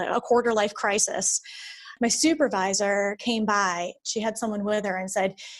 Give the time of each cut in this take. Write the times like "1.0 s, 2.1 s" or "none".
1.9 s, 4.0 s